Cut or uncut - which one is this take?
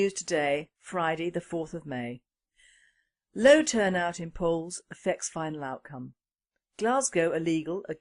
uncut